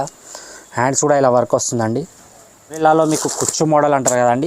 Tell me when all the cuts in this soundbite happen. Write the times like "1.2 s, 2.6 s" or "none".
2.8 s